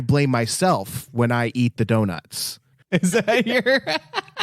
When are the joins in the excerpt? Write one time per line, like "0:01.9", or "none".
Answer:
0:02.9